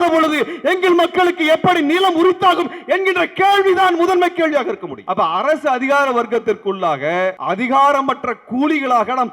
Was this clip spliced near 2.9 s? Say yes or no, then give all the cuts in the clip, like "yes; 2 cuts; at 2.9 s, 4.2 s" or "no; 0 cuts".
no; 2 cuts; at 5.0 s, 7.4 s